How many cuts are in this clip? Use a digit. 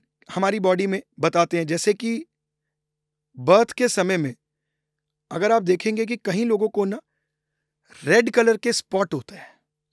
0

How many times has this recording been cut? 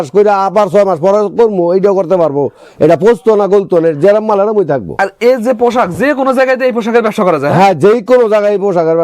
0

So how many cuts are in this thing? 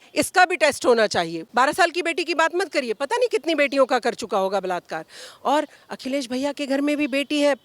1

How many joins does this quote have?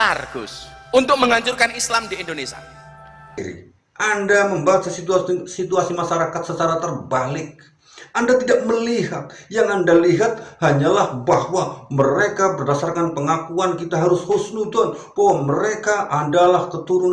1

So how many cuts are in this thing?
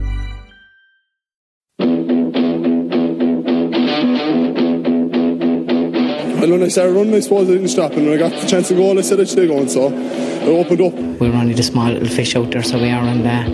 1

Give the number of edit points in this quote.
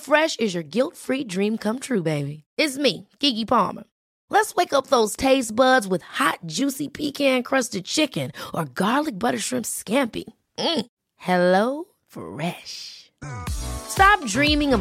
0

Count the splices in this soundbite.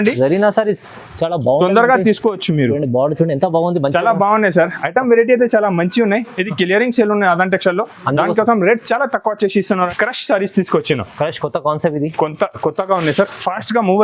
1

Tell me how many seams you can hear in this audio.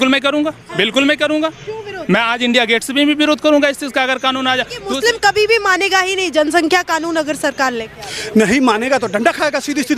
1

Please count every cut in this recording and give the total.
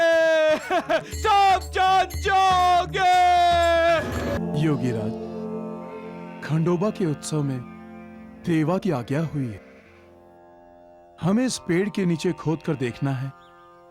1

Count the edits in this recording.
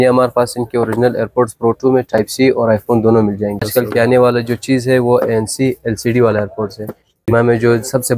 2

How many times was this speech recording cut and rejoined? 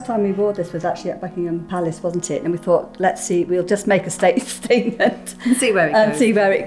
0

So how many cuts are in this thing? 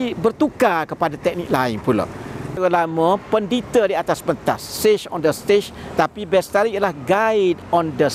1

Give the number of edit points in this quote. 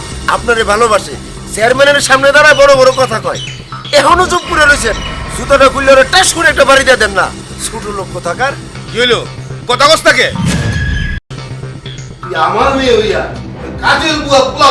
1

